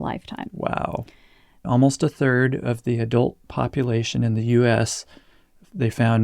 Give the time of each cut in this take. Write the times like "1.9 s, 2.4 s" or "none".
1.6 s